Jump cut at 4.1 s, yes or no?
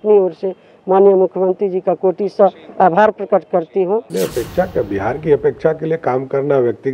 yes